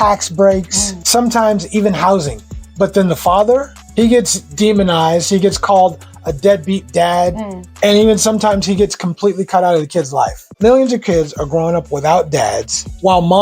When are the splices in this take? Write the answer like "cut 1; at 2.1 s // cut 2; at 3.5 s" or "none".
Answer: cut 1; at 10.4 s